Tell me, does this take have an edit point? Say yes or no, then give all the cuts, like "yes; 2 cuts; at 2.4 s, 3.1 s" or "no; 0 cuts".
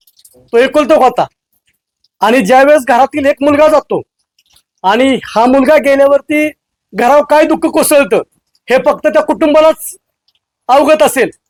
no; 0 cuts